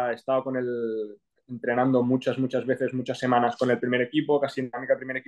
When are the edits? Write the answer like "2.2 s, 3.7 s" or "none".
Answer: none